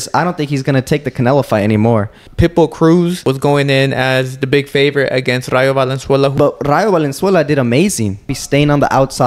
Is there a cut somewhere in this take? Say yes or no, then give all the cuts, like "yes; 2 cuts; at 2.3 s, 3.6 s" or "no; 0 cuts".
yes; 4 cuts; at 2.2 s, 3.2 s, 6.3 s, 8.3 s